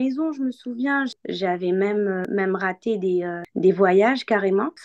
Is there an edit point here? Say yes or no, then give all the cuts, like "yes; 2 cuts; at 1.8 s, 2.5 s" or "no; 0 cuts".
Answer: yes; 2 cuts; at 1.2 s, 2.2 s